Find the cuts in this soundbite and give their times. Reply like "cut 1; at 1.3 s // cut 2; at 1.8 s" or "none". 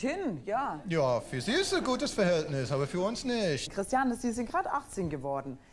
cut 1; at 3.7 s